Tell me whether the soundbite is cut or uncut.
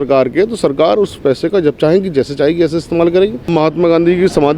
cut